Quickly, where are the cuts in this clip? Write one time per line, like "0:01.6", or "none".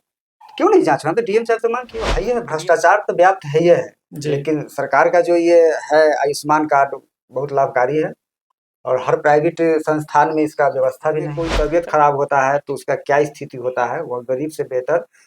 0:02.1
0:11.4